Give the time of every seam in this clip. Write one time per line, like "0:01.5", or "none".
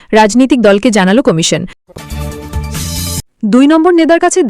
0:01.8